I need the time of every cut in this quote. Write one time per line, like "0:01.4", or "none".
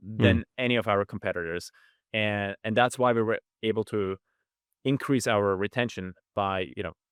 none